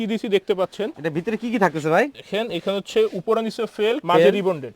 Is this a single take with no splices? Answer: yes; 0 cuts

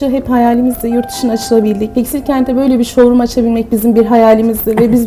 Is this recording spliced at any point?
yes; 1 cut; at 1.9 s

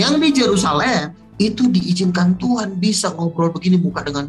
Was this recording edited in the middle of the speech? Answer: yes; 1 cut; at 1.2 s

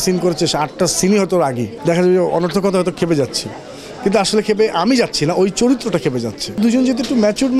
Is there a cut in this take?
yes; 2 cuts; at 1.7 s, 6.6 s

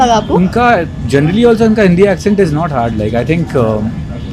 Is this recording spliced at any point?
no; 0 cuts

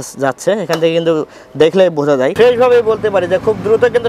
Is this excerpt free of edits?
no; 1 cut; at 2.3 s

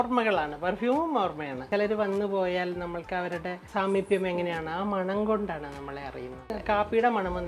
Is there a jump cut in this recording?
yes; 3 cuts; at 1.7 s, 3.6 s, 6.6 s

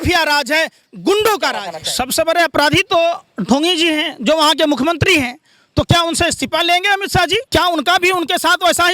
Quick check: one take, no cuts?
no; 2 cuts; at 1.8 s, 7.4 s

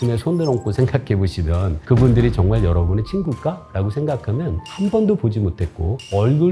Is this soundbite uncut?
no; 1 cut; at 4.6 s

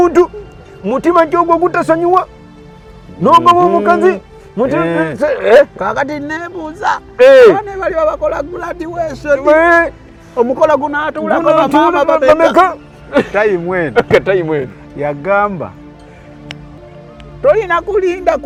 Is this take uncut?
yes; 0 cuts

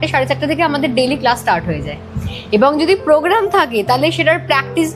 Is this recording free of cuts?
yes; 0 cuts

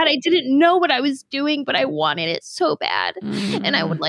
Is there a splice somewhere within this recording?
no; 0 cuts

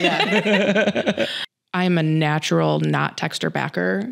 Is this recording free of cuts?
no; 1 cut; at 1.4 s

